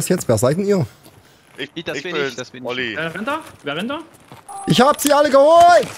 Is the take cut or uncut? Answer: cut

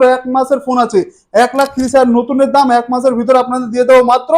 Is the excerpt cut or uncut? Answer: uncut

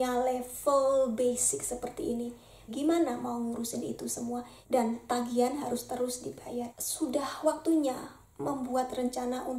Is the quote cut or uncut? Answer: cut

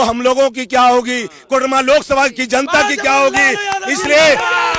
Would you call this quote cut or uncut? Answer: uncut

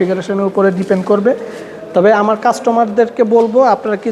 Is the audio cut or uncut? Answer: uncut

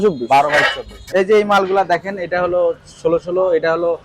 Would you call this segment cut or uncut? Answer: cut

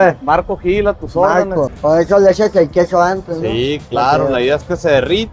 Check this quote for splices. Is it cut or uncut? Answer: cut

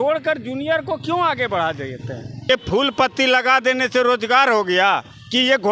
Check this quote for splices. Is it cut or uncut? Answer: cut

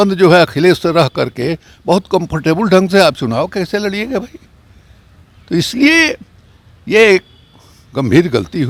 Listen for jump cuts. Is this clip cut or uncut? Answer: uncut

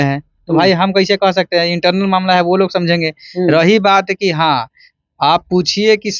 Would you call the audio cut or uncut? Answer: uncut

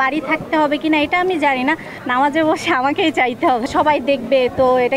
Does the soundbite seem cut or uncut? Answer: cut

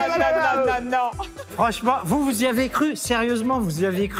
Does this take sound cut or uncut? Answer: cut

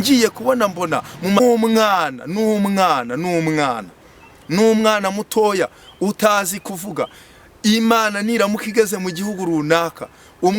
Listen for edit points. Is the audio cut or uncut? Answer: cut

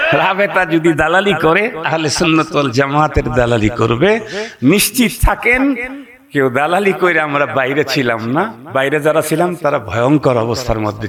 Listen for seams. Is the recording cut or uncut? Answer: uncut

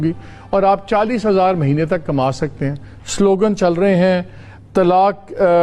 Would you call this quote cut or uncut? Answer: uncut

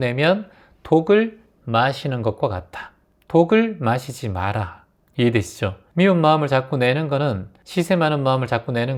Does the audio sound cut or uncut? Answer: uncut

